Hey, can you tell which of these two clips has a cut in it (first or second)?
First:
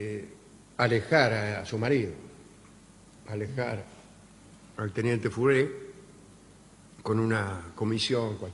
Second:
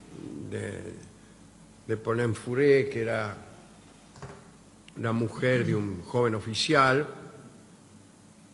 second